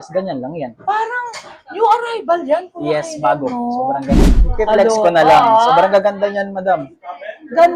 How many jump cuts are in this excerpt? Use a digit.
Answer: 1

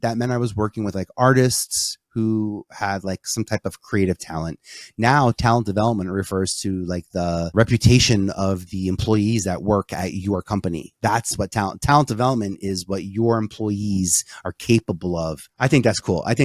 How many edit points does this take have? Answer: 2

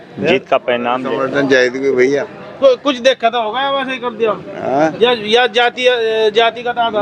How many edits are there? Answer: 1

